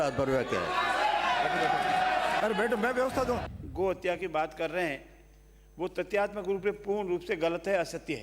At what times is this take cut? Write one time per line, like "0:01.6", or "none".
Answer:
0:03.5